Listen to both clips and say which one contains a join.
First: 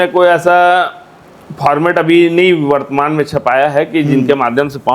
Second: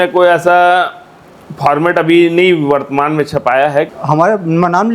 second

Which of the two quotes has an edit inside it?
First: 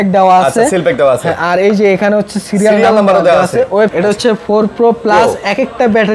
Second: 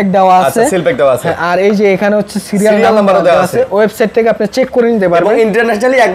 first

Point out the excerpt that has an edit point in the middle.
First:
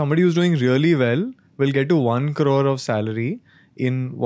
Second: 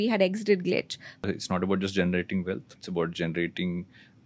second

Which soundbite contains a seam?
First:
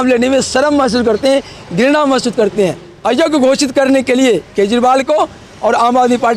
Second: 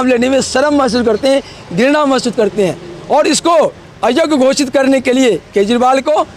first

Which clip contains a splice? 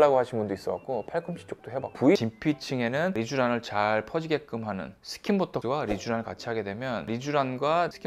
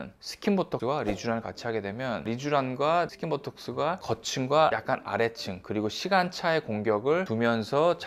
first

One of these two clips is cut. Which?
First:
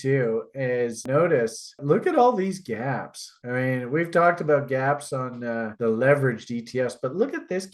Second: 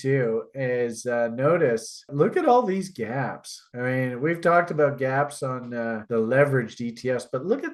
first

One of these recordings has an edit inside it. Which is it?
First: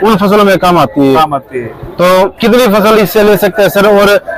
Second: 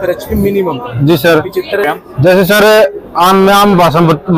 second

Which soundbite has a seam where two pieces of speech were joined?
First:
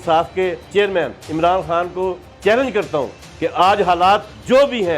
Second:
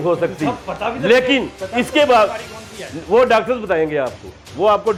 first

